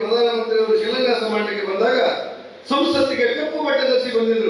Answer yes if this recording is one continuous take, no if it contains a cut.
yes